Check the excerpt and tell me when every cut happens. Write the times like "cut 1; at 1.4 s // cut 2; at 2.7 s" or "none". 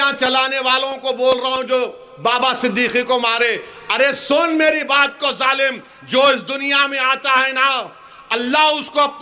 none